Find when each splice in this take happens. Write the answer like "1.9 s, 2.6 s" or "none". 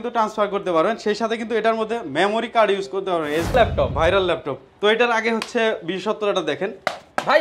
3.5 s